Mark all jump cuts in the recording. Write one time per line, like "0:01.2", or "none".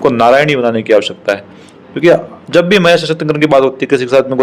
none